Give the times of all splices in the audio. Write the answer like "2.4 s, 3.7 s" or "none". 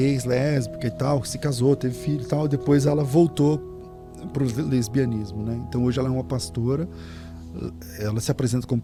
none